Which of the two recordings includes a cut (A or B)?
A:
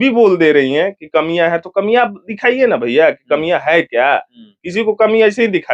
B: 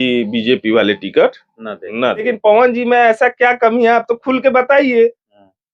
B